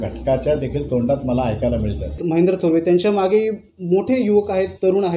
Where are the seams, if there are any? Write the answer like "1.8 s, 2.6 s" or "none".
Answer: 2.2 s